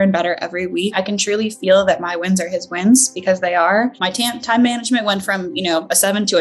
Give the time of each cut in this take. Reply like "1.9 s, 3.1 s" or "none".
1.0 s, 4.0 s

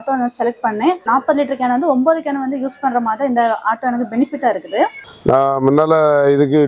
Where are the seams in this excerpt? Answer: 1.0 s, 5.0 s

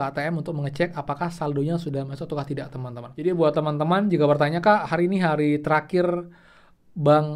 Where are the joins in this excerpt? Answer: 3.1 s

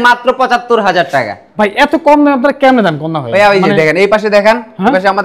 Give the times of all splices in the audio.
none

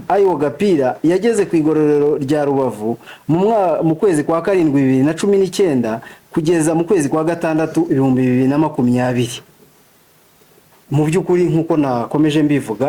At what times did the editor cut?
none

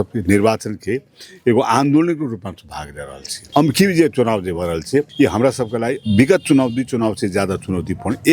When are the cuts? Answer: 3.3 s, 5.1 s, 6.0 s

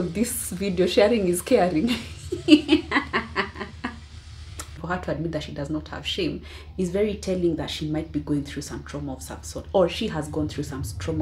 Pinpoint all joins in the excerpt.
4.8 s

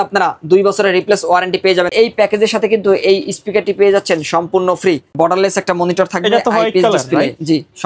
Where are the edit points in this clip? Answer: 1.9 s, 5.1 s

